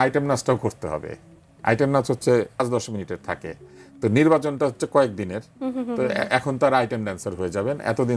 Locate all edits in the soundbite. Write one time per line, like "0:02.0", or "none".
0:02.6